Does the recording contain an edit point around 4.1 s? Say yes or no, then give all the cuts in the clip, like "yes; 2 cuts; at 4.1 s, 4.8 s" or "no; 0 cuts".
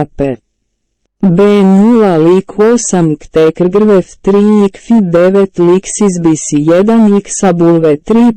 no; 1 cut; at 5.5 s